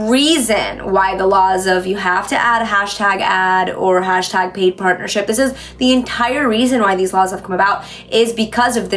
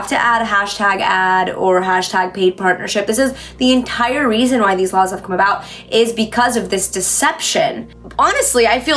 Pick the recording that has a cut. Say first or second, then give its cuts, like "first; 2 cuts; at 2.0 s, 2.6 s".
second; 1 cut; at 8.0 s